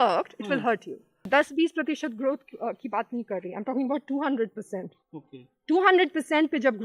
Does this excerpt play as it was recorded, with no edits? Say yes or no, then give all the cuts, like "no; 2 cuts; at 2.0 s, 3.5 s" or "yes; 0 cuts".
no; 1 cut; at 1.1 s